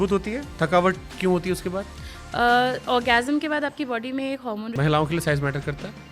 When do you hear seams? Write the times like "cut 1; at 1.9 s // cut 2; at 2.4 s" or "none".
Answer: cut 1; at 4.7 s